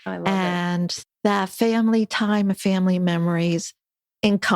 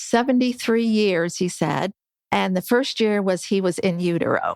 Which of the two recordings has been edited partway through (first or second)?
first